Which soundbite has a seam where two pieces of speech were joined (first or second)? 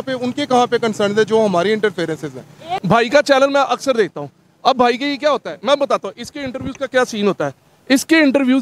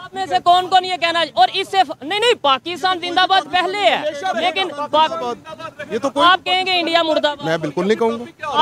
first